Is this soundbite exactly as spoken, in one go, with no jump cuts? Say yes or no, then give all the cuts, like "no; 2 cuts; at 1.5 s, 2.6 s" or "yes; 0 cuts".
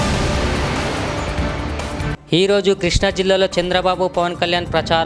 yes; 0 cuts